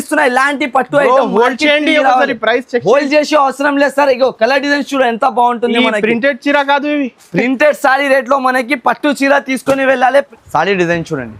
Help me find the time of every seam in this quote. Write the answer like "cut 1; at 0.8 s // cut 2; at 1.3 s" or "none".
cut 1; at 10.3 s